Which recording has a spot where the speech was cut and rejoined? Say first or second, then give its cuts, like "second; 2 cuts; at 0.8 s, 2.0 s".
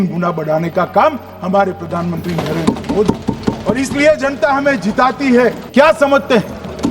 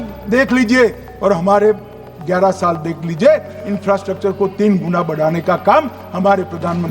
first; 1 cut; at 5.6 s